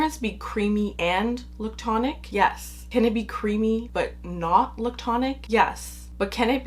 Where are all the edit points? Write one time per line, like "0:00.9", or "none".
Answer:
0:00.9
0:02.2
0:03.9
0:05.4